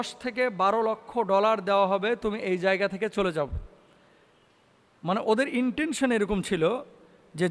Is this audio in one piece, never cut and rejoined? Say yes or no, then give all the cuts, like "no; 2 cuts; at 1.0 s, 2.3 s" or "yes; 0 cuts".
yes; 0 cuts